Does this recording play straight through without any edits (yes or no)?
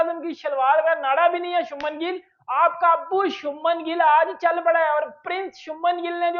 yes